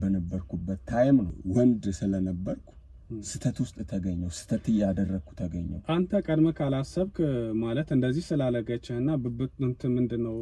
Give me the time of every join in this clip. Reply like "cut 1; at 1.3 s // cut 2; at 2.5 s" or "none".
cut 1; at 1.4 s